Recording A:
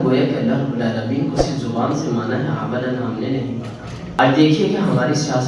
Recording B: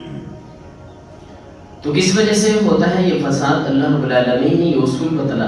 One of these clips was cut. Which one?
A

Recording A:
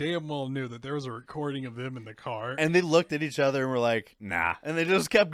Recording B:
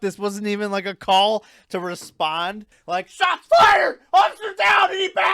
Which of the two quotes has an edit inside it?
B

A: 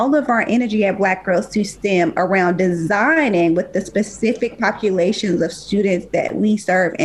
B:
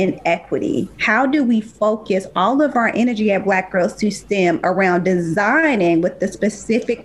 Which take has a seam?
B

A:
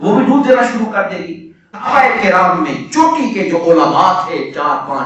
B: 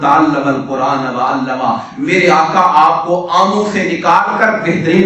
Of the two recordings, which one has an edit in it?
A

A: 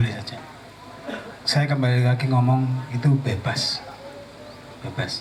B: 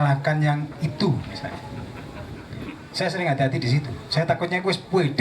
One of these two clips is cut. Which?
B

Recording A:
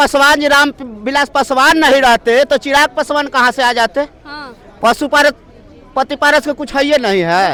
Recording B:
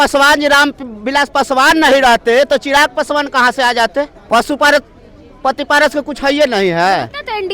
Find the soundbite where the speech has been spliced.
B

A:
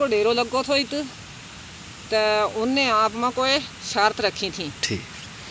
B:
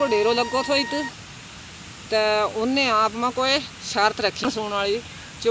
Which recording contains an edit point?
B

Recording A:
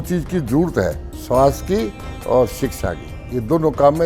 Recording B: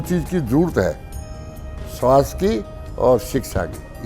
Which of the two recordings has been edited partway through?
A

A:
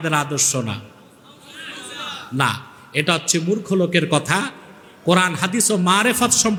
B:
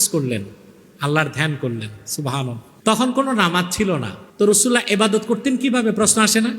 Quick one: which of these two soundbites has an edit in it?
B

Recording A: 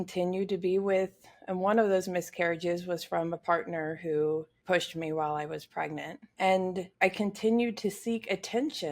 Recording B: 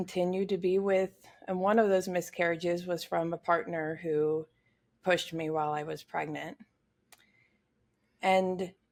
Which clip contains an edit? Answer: A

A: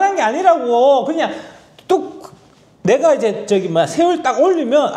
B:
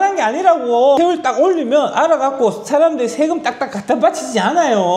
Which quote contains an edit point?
B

